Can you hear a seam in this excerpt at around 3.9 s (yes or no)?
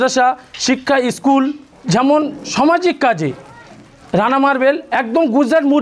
no